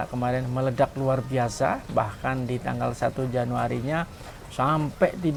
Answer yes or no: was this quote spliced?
no